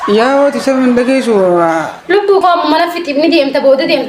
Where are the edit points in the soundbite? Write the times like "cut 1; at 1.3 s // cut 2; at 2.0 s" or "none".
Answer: none